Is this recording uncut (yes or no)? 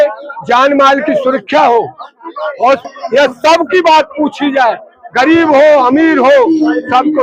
no